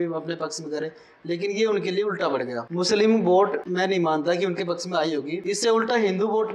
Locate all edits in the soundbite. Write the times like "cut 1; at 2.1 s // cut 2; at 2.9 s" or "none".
cut 1; at 2.6 s // cut 2; at 3.6 s // cut 3; at 5.4 s